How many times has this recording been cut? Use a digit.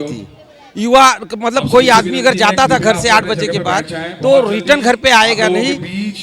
0